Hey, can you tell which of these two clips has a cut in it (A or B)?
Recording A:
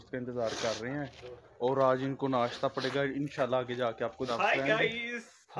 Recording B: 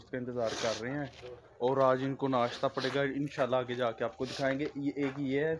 A